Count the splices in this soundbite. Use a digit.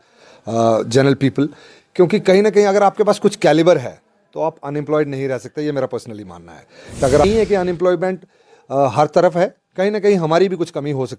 1